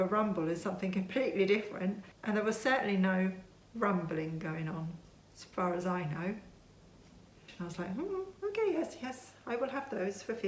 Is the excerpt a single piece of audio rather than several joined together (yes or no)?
no